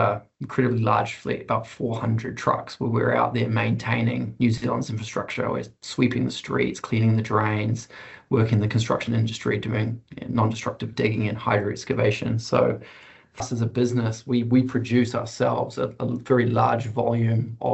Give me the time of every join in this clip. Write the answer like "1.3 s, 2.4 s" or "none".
13.4 s